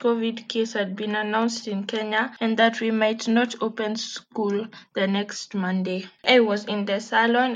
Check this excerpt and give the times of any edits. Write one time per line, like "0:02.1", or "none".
0:02.3
0:06.1